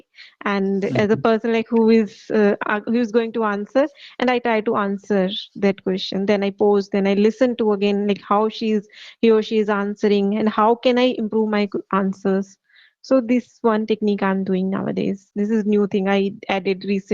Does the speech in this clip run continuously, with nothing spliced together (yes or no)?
yes